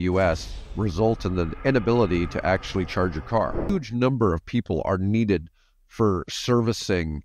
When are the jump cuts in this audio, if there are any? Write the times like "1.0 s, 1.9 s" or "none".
3.7 s